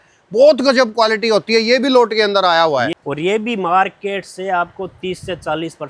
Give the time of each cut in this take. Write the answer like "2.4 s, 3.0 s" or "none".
2.9 s